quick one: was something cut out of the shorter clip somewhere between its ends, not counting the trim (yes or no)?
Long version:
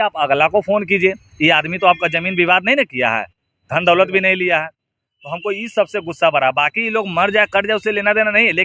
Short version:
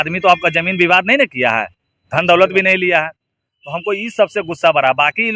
no